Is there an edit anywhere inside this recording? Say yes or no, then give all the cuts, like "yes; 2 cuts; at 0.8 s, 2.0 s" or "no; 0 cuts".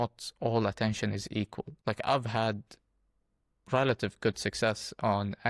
no; 0 cuts